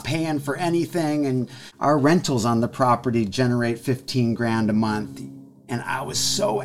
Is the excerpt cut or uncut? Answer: cut